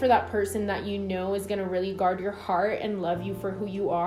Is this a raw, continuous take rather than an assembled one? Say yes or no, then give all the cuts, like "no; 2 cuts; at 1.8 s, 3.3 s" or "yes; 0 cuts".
yes; 0 cuts